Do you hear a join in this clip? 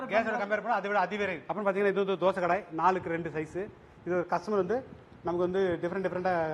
yes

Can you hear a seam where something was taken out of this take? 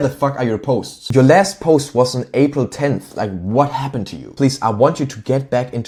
no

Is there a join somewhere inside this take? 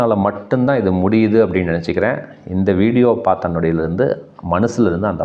no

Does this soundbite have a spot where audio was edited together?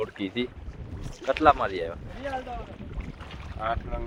no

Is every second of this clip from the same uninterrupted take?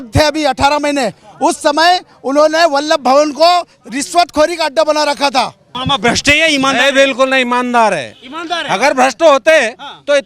no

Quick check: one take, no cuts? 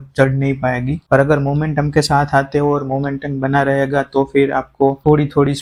yes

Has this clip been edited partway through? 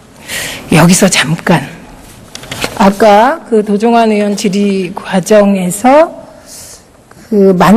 yes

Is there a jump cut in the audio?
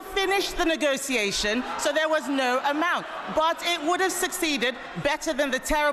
no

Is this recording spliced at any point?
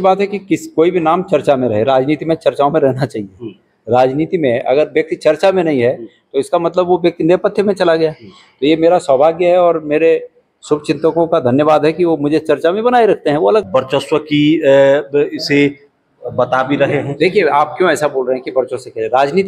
yes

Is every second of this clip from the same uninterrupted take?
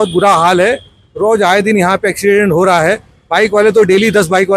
yes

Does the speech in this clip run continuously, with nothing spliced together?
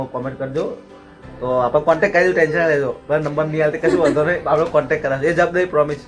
yes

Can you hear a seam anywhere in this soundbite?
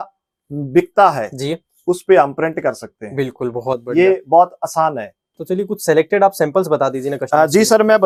no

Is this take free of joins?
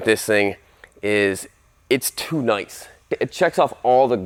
yes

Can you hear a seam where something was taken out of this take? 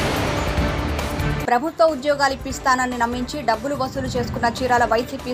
yes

